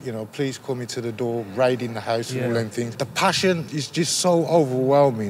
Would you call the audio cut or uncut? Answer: cut